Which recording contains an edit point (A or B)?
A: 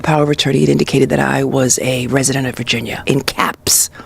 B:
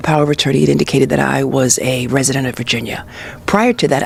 A